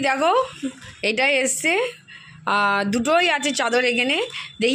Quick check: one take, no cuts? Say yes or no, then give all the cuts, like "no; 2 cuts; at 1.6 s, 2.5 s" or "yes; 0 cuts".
yes; 0 cuts